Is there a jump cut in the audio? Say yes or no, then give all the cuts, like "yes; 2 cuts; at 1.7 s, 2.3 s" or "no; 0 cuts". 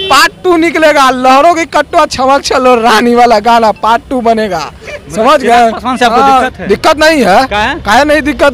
no; 0 cuts